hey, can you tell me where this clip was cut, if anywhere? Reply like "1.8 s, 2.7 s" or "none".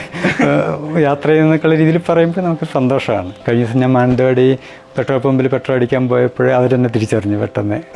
3.3 s